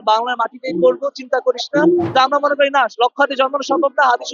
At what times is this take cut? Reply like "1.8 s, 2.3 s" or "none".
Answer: 2.1 s